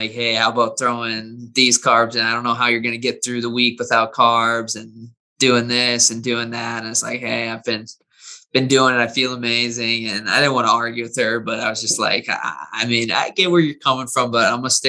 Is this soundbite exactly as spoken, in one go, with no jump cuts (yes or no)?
yes